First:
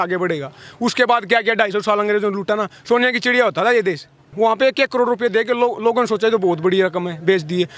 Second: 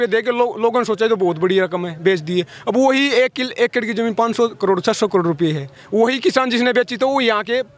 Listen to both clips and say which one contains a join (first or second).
first